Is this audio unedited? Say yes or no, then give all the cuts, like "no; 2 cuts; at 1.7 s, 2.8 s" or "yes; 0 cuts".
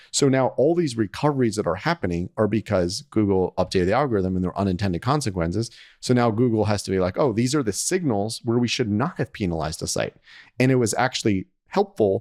yes; 0 cuts